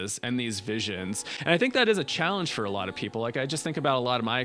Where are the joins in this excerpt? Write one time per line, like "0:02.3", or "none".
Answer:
none